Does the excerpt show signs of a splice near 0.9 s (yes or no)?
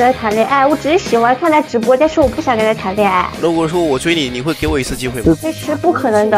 no